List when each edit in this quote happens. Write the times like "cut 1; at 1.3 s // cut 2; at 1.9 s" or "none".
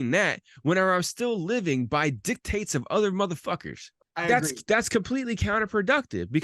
cut 1; at 4.1 s